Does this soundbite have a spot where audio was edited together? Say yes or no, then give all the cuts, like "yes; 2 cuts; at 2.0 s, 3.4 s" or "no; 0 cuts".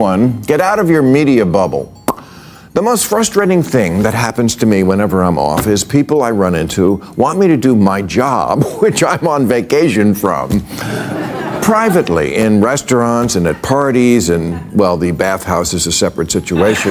no; 0 cuts